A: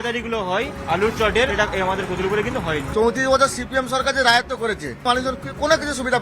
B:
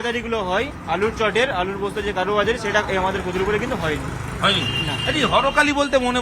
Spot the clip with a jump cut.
A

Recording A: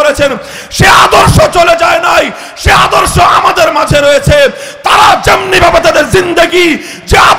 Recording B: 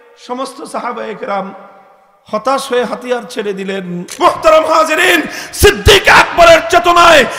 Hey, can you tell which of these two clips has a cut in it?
B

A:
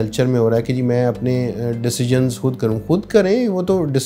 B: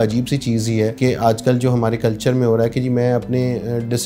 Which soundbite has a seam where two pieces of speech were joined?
B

